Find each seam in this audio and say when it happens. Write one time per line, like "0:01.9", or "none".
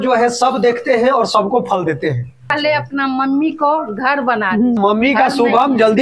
0:02.5
0:04.8